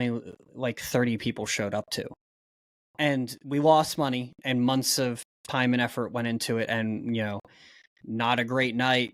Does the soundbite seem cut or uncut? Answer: uncut